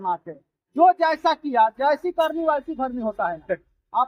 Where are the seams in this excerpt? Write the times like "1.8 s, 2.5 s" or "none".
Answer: none

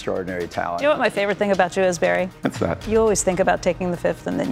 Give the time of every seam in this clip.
0.8 s, 2.4 s

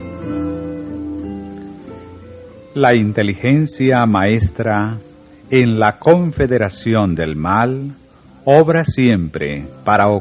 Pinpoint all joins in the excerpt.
4.4 s

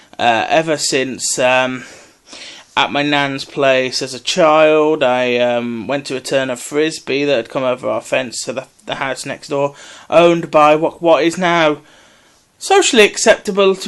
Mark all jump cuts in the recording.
7.5 s

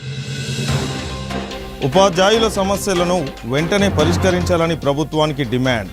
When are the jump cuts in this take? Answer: 0.9 s

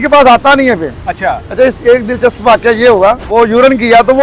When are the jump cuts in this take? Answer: 3.2 s

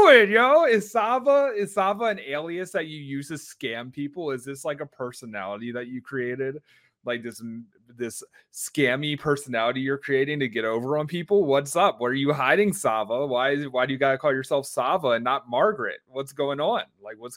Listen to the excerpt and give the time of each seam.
none

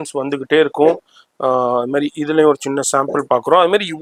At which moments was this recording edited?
none

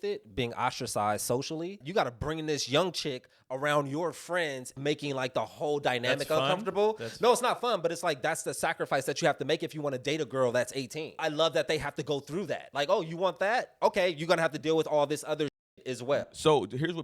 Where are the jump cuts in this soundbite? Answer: 1.8 s, 4.8 s, 11.2 s, 12.7 s

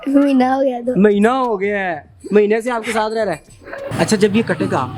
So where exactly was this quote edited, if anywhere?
3.9 s

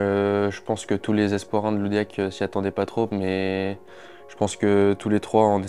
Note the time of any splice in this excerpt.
none

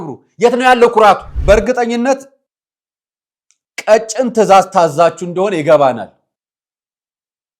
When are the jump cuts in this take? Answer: 1.3 s

